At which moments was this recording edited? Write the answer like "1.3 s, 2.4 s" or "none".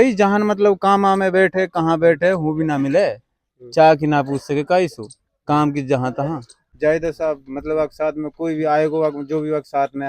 6.6 s